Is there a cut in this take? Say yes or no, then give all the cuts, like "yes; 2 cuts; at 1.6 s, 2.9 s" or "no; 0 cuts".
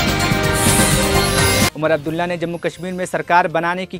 yes; 1 cut; at 1.7 s